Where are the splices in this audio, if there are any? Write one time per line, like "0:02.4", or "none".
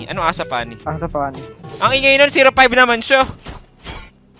0:01.6